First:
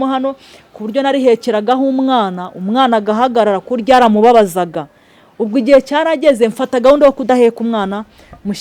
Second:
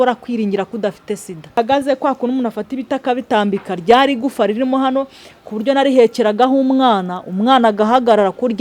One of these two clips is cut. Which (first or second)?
second